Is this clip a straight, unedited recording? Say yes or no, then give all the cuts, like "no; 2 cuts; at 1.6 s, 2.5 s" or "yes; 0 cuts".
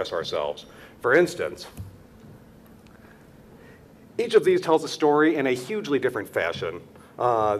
yes; 0 cuts